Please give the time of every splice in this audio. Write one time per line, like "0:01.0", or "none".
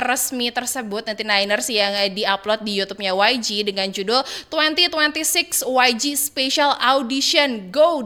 none